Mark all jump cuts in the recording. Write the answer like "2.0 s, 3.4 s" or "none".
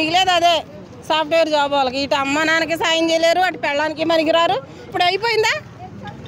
4.9 s